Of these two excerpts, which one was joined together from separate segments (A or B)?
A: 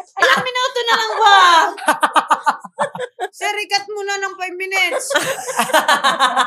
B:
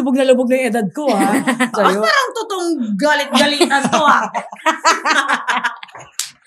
B